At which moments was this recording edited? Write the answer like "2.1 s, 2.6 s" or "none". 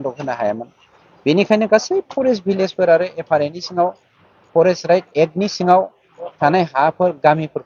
none